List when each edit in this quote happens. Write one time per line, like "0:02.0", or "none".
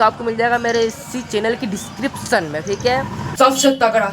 0:03.2